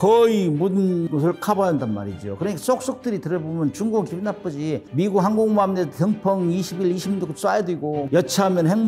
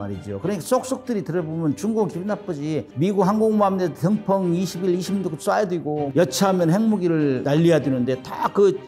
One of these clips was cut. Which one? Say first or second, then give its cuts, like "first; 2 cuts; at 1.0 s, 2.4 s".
first; 1 cut; at 1.1 s